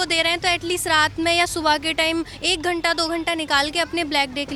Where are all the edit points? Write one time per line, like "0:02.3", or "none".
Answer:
none